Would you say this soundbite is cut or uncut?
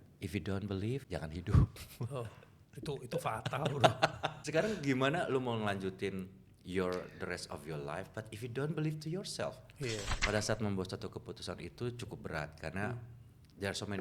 cut